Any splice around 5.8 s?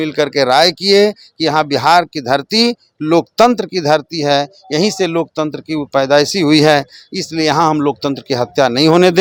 no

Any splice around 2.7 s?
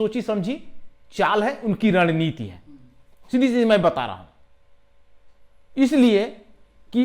no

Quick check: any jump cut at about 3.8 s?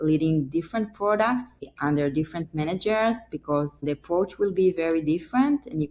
yes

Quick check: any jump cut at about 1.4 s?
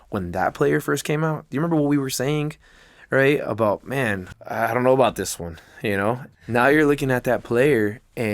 no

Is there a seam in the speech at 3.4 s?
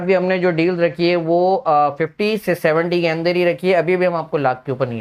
no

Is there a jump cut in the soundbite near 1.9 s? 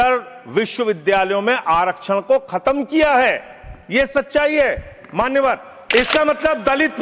no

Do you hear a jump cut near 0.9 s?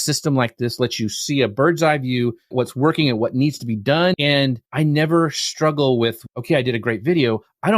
no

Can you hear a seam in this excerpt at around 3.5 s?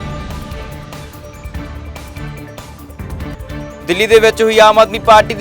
yes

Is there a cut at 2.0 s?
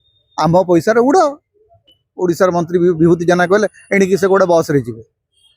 yes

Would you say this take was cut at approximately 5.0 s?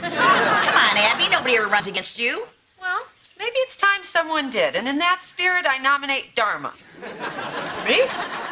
yes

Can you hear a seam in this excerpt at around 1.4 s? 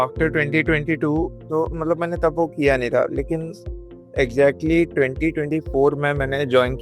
yes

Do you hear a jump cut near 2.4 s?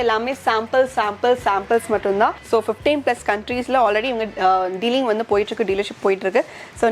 yes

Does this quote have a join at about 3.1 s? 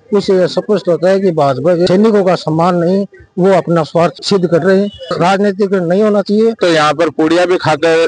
no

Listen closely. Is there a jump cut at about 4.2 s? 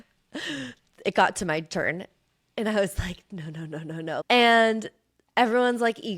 yes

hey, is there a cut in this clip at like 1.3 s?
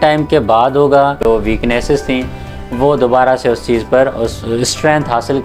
yes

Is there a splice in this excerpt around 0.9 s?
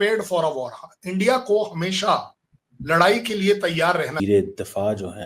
no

